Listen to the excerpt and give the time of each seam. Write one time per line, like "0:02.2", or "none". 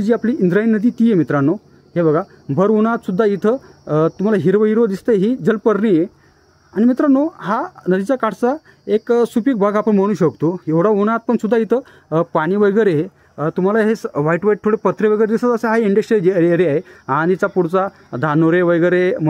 none